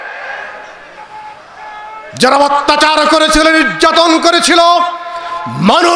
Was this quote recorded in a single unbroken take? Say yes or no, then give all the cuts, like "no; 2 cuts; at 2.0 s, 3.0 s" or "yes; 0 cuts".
yes; 0 cuts